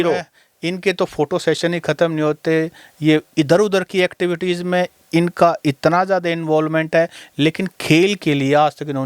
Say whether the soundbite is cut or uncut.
uncut